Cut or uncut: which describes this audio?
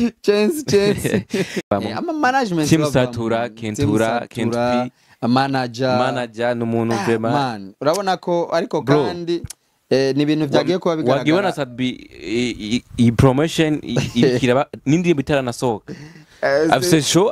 cut